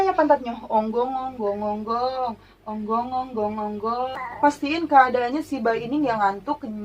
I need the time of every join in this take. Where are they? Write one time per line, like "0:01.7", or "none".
0:04.2

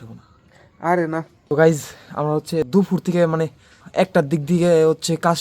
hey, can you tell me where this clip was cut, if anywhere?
0:01.4
0:02.7
0:03.8

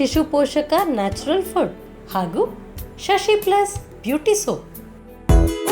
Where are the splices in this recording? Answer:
none

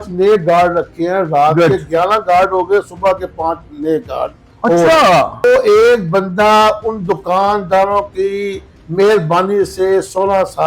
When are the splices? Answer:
0:05.4

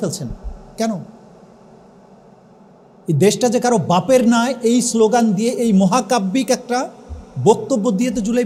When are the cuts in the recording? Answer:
none

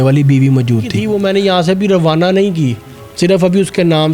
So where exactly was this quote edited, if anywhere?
0:01.0

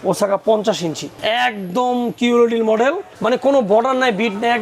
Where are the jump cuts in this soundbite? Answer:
0:01.1
0:03.1

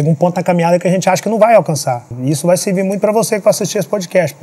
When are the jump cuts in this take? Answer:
0:02.1

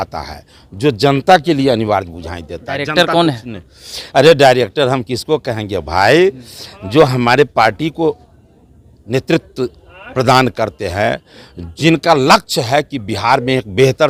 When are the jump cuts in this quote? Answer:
none

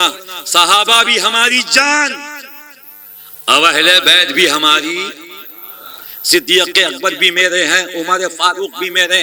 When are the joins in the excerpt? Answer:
none

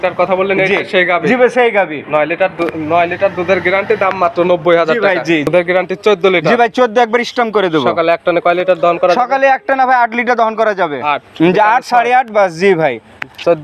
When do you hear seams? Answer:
0:05.5

